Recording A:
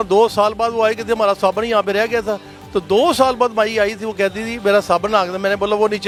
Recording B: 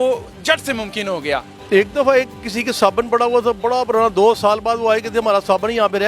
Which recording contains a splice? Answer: B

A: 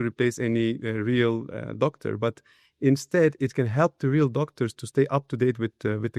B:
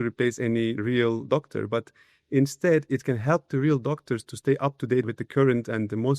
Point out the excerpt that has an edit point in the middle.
B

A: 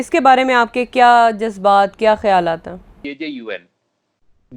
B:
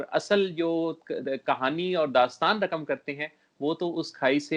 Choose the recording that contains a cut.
A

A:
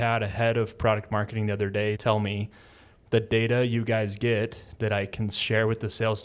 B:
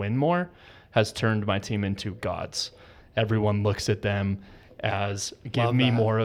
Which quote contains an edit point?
A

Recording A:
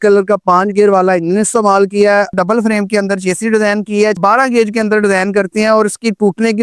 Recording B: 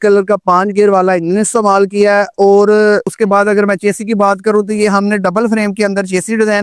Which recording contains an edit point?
A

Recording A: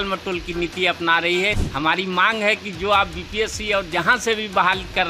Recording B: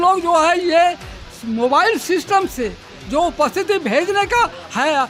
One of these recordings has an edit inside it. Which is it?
A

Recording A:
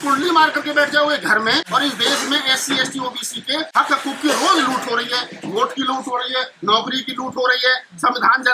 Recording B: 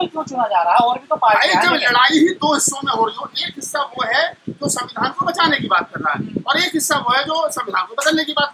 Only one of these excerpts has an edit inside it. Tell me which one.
A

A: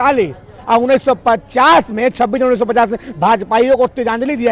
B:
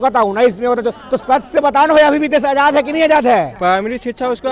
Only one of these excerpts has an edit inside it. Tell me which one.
B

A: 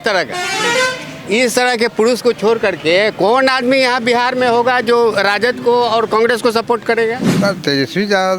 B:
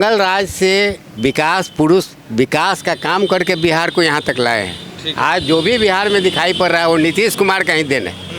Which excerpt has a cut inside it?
A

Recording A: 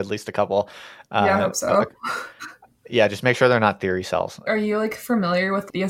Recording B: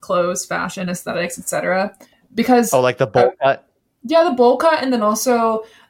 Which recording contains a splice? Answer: A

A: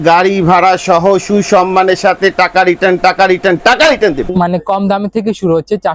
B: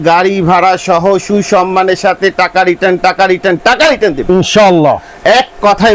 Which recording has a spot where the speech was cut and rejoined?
A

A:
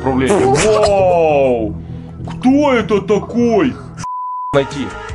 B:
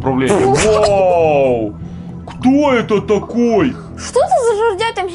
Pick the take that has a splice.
A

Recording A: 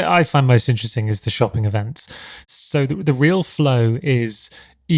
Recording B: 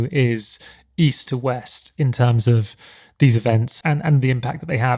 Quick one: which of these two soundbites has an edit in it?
A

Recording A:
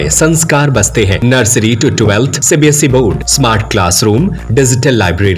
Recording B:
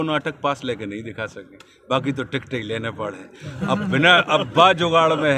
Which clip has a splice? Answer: A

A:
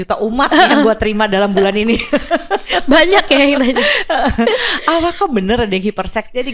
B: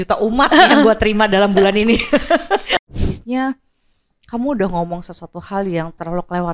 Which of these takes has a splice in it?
B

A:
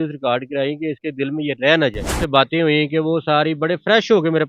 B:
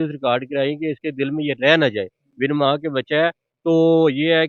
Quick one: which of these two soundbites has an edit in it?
A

